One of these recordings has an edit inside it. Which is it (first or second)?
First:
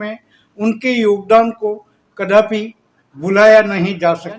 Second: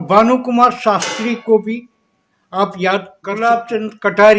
second